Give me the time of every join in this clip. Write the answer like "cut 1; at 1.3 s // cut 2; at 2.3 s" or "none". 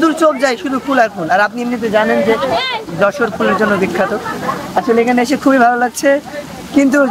none